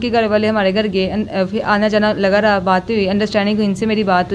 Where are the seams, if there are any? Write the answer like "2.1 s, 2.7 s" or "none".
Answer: none